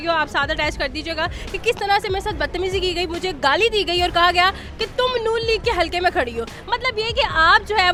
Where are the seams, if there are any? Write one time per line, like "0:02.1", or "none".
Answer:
none